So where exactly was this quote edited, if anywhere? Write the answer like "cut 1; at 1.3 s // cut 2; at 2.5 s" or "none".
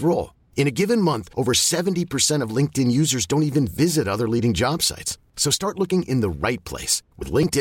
none